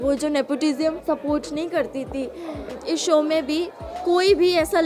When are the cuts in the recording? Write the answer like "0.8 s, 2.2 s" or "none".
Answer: 1.0 s, 2.7 s